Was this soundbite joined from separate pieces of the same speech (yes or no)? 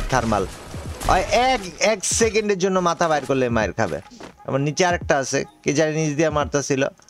no